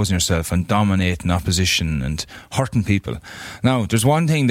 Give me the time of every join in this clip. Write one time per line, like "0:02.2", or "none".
none